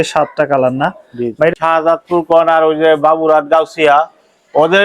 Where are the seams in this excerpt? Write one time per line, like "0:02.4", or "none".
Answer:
0:01.5